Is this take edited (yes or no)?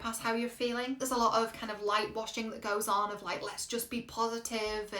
yes